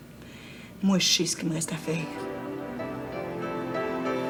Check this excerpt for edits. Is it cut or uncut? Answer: uncut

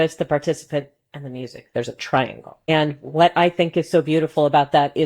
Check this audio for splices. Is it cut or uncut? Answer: cut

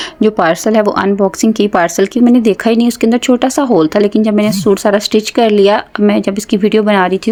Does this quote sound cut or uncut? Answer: uncut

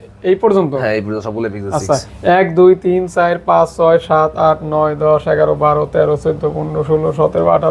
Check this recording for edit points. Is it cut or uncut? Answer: uncut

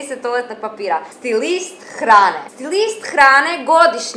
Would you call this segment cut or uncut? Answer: cut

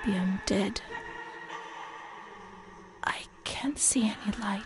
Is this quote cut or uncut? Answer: cut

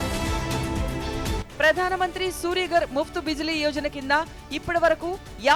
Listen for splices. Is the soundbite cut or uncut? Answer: uncut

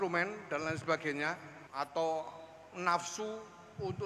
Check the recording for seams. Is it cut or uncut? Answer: cut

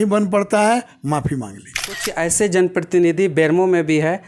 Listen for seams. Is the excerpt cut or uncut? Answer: cut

